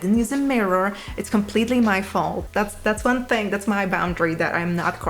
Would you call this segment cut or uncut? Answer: cut